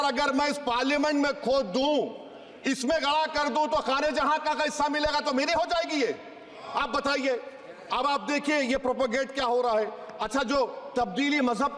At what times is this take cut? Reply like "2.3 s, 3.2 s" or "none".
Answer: none

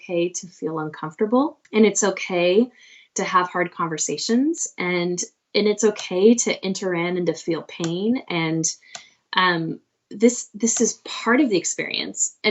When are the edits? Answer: 1.6 s

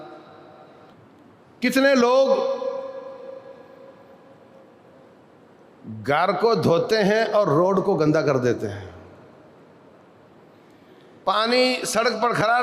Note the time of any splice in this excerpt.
0.9 s

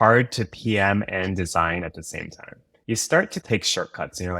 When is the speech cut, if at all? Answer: 2.7 s

